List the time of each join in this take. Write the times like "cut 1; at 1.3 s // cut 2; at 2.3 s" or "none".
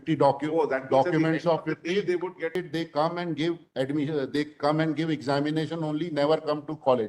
cut 1; at 2.5 s